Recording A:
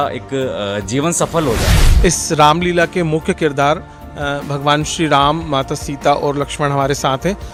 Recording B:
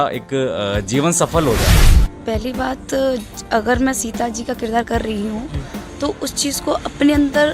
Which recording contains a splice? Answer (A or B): B